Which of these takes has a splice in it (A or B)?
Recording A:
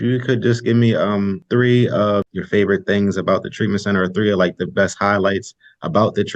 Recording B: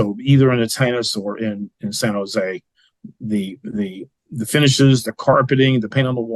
A